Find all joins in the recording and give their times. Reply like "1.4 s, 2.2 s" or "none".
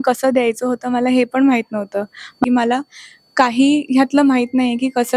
2.4 s